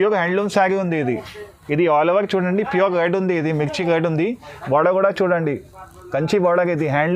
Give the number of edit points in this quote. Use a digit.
0